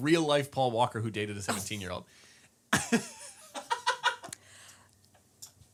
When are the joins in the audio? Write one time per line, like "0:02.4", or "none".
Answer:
none